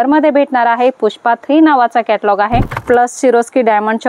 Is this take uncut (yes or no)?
no